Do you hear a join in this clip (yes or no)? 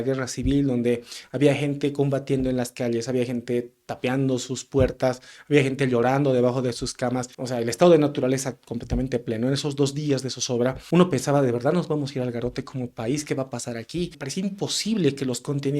yes